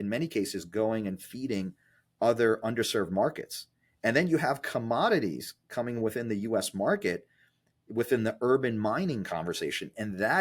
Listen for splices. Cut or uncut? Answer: uncut